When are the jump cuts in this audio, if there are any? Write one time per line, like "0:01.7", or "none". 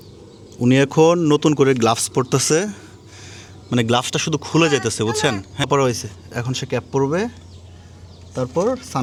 none